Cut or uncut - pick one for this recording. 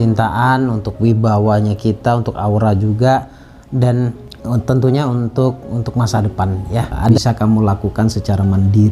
cut